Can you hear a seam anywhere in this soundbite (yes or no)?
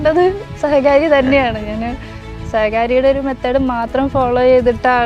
no